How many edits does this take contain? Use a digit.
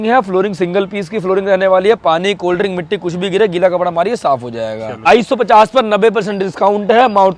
1